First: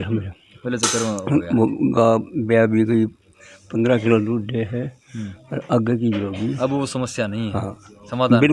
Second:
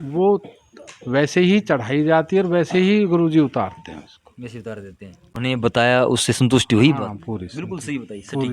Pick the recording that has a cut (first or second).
second